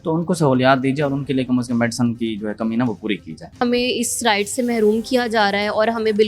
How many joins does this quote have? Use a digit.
1